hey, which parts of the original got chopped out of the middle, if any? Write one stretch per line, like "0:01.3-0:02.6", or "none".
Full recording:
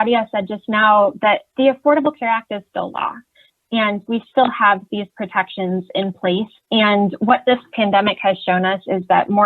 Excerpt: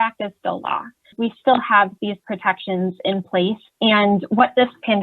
0:03.4-0:04.0